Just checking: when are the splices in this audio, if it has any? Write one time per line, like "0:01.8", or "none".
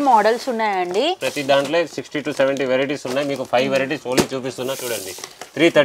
0:01.3

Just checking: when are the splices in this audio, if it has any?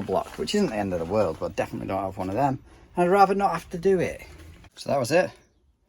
0:04.3

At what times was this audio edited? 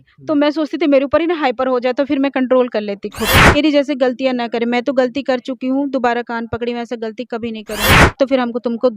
0:03.6
0:08.2

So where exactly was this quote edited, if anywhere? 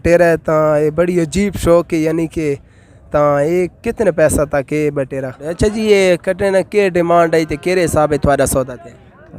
0:05.4

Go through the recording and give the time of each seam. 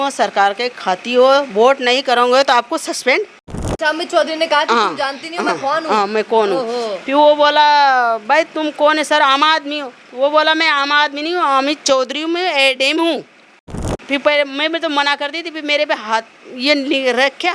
0:03.6
0:13.9

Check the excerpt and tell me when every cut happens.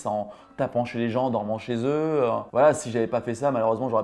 0:02.5

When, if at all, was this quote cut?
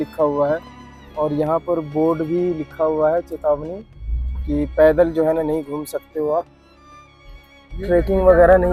none

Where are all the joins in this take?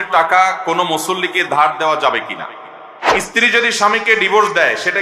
0:02.7

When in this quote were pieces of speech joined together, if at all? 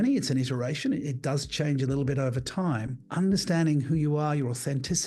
0:03.0

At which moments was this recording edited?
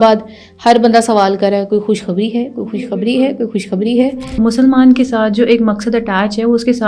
0:04.4

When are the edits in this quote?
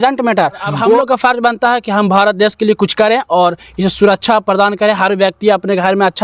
0:01.0

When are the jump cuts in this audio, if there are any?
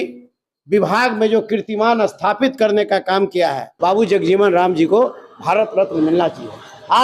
0:03.7

